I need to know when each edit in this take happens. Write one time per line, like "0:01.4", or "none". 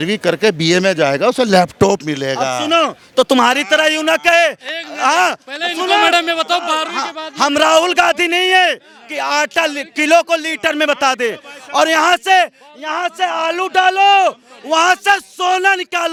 none